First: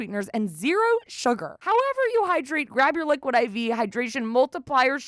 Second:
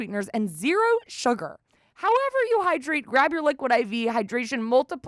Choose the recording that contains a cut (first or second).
first